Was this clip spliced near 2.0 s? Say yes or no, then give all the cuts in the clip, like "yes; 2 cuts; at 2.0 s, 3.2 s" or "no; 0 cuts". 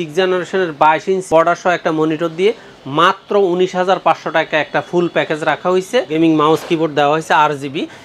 no; 1 cut; at 6.1 s